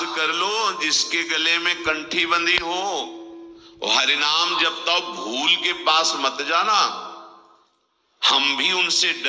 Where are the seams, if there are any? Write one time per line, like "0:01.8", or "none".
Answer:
none